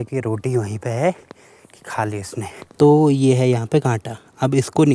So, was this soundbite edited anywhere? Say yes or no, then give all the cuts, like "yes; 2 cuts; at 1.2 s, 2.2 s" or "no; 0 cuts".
yes; 1 cut; at 2.7 s